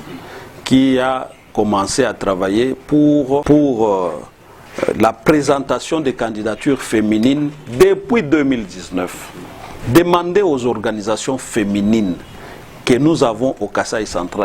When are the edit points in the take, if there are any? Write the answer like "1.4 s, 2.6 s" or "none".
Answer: 3.4 s